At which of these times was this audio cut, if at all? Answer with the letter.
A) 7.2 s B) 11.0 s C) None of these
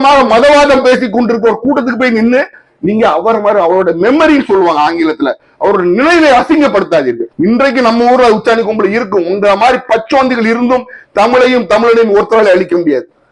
A